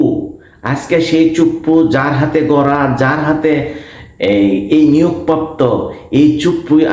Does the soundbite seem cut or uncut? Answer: uncut